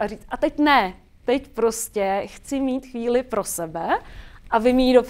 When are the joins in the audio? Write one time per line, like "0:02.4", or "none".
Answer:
none